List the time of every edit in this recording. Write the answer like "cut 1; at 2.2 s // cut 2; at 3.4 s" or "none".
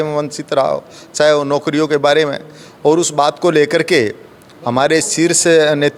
none